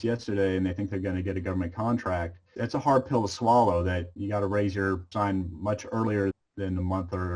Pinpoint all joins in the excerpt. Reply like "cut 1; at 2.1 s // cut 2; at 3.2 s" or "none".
cut 1; at 2.5 s // cut 2; at 4.1 s // cut 3; at 5.1 s // cut 4; at 6.3 s